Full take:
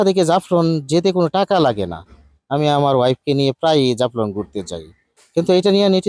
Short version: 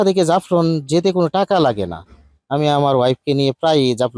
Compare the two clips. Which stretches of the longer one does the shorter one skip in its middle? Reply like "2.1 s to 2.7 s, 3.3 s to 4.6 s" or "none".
none